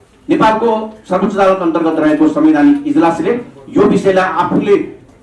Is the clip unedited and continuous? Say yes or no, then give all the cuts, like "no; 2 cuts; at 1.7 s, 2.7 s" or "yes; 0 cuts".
yes; 0 cuts